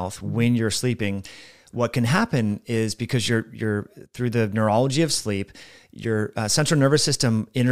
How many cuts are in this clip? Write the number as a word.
zero